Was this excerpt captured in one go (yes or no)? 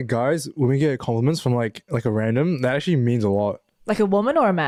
yes